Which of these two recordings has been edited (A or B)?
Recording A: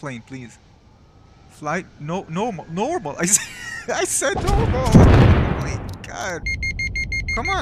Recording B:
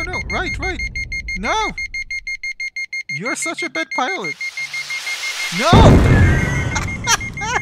A